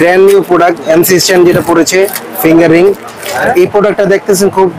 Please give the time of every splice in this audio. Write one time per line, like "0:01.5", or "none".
0:03.4